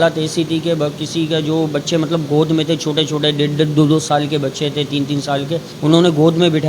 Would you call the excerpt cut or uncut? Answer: cut